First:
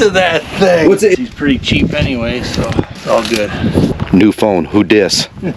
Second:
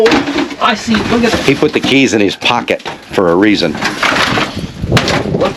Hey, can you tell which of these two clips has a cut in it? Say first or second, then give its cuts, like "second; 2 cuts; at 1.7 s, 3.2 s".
first; 3 cuts; at 1.1 s, 3.0 s, 3.9 s